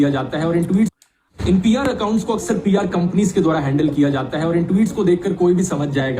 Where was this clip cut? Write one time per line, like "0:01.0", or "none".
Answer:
0:00.9